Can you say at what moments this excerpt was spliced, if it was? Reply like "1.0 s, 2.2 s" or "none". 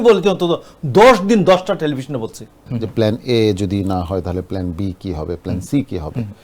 2.6 s